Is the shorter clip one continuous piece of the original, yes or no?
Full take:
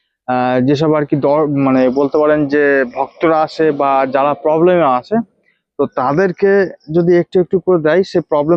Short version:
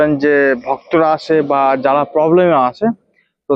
yes